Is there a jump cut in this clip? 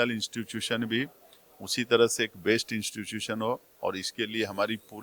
no; 0 cuts

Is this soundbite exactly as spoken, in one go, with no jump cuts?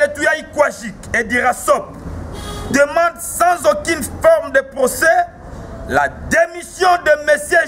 yes; 0 cuts

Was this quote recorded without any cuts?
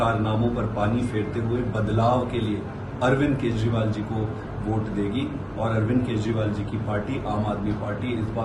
yes; 0 cuts

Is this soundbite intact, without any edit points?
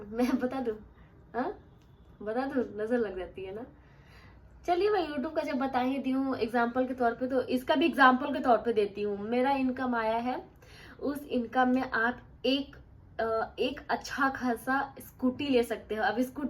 yes; 0 cuts

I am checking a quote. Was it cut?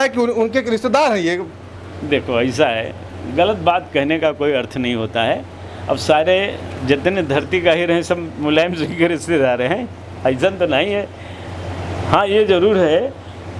no; 0 cuts

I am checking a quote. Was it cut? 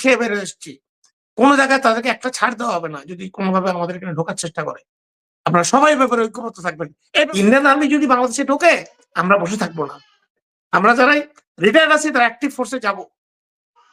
yes; 1 cut; at 7.3 s

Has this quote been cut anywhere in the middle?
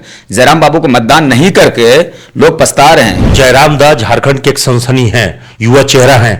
yes; 1 cut; at 3.3 s

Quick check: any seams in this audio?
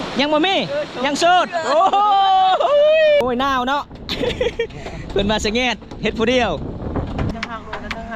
yes; 2 cuts; at 3.2 s, 7.3 s

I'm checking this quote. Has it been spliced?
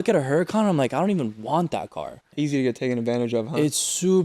yes; 1 cut; at 2.2 s

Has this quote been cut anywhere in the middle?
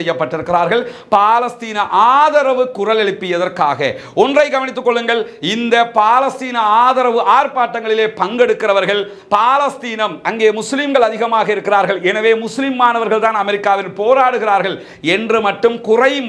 no; 0 cuts

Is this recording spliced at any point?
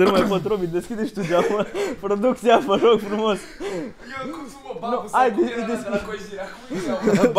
no; 0 cuts

